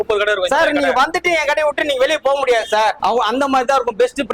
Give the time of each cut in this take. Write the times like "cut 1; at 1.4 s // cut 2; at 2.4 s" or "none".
cut 1; at 3.0 s